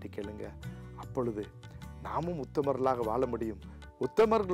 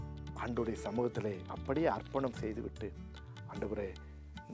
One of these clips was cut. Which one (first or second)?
second